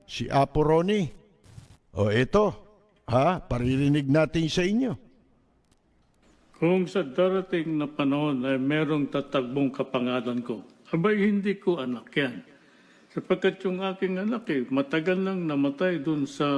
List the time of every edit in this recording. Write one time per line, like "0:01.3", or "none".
none